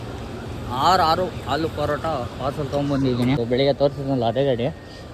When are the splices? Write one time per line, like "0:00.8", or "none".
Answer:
0:03.4